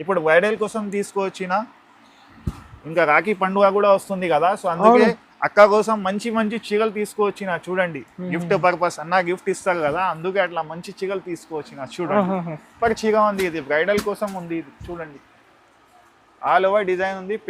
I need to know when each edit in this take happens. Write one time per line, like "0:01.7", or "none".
0:12.7